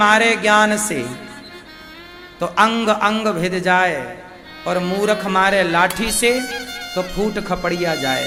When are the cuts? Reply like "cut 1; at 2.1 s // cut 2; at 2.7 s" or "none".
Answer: none